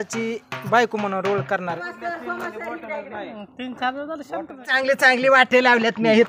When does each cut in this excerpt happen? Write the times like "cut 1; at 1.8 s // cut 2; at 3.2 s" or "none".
cut 1; at 1.8 s // cut 2; at 4.6 s